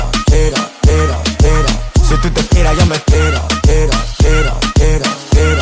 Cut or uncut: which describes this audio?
uncut